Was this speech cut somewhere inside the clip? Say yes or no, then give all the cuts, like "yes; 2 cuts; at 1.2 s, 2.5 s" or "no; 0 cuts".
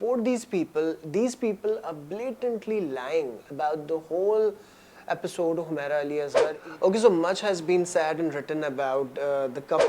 yes; 1 cut; at 6.3 s